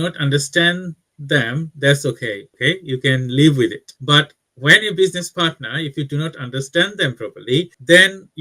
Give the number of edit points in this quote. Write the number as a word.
one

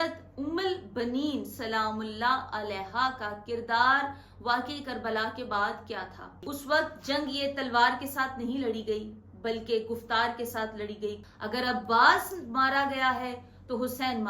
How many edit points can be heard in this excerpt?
two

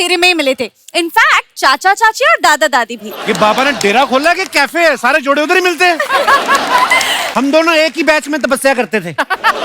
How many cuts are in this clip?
one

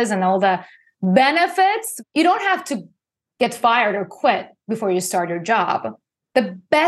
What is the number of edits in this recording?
one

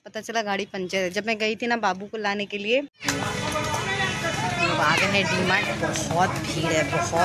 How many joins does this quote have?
one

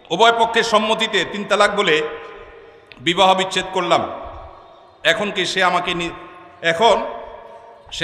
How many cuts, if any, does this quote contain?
zero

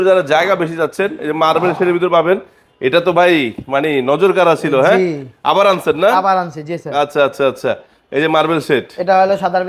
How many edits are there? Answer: zero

